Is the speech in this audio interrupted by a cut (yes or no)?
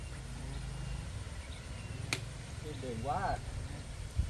no